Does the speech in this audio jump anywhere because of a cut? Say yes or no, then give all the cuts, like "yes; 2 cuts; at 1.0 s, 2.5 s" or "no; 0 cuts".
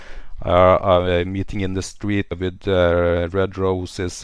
yes; 1 cut; at 2.4 s